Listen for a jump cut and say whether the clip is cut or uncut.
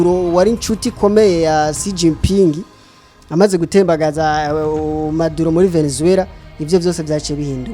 uncut